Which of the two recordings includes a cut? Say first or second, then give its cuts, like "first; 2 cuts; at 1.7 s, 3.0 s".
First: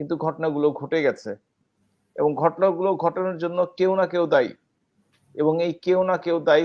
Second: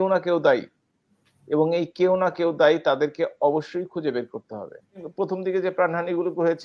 second; 1 cut; at 5.1 s